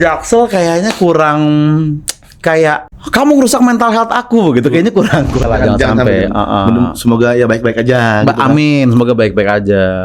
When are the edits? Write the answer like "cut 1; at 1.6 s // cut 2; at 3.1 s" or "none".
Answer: cut 1; at 2.9 s // cut 2; at 5.4 s